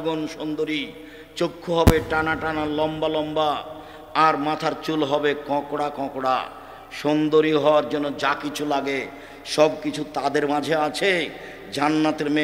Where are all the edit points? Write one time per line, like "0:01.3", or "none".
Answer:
none